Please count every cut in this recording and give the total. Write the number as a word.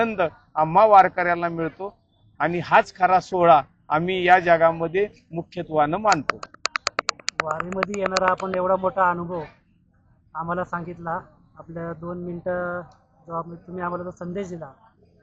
zero